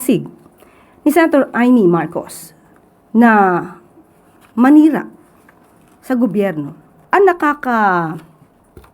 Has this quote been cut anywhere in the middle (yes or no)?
yes